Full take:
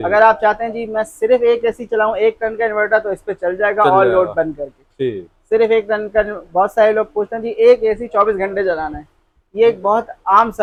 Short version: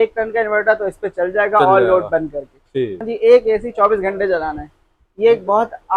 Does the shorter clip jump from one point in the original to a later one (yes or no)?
yes